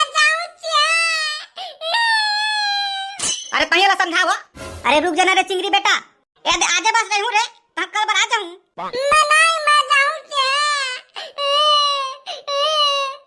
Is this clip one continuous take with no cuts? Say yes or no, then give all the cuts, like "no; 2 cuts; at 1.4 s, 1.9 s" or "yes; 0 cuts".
yes; 0 cuts